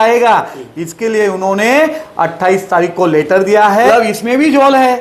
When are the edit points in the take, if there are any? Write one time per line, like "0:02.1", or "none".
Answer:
0:03.9